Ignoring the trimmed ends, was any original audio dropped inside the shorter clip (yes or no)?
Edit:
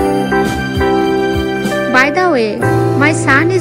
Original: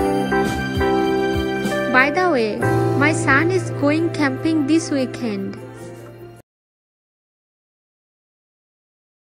no